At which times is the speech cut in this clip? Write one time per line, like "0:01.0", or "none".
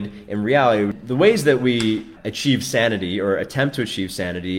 0:01.0
0:02.2